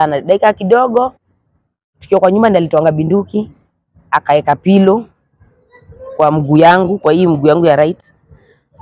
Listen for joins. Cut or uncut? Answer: uncut